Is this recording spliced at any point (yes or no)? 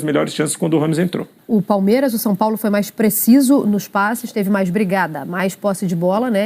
yes